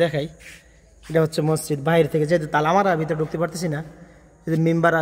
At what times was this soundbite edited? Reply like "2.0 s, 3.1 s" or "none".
none